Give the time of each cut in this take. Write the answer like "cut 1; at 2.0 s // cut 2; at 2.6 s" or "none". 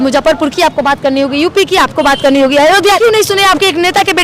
cut 1; at 3.0 s